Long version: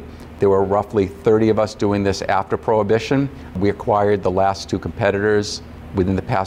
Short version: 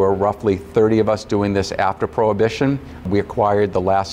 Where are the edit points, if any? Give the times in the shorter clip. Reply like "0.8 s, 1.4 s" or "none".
none

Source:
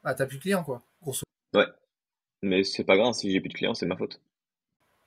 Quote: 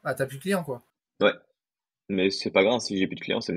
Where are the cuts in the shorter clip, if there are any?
1.0 s

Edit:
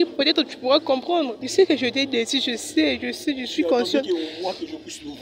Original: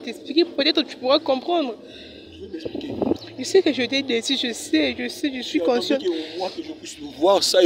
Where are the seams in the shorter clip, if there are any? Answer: 1.4 s

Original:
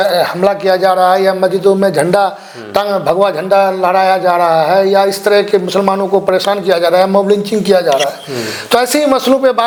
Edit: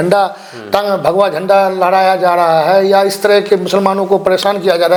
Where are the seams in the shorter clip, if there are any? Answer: none

